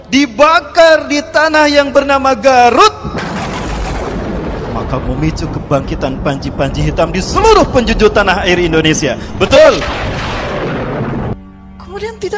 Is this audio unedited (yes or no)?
no